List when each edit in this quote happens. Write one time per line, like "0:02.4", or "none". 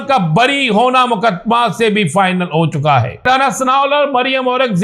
0:03.3